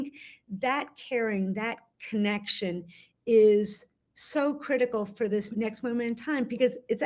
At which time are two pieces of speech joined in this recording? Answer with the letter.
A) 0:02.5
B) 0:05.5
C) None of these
B